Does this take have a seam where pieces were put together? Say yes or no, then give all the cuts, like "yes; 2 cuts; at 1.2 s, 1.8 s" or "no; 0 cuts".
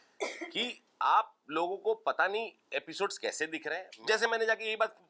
yes; 1 cut; at 3.9 s